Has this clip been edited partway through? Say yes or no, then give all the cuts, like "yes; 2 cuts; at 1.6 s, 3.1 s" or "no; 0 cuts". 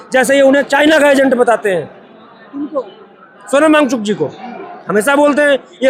no; 0 cuts